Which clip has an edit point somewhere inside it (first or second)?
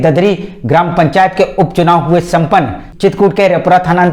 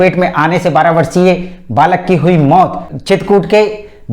first